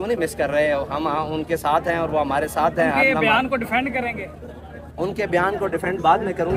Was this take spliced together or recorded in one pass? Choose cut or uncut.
uncut